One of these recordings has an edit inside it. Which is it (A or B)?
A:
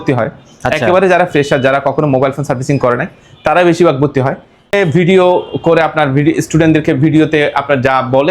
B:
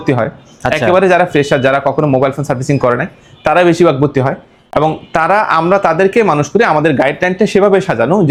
A